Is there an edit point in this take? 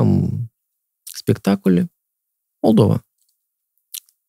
no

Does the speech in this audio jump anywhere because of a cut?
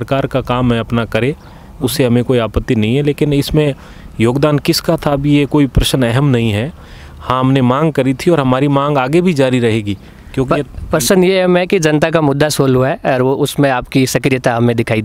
no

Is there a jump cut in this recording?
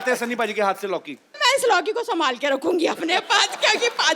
yes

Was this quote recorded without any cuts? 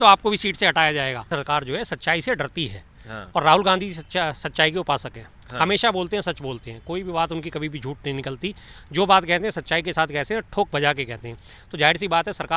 no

